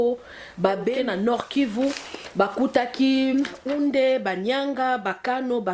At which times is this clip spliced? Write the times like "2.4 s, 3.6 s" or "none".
0.9 s, 3.6 s